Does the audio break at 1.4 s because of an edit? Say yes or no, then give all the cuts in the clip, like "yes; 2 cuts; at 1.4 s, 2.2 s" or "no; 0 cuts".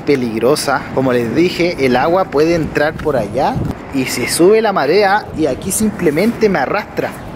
no; 2 cuts; at 3.8 s, 5.3 s